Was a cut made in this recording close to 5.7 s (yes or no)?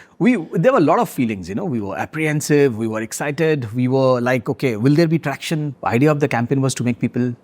yes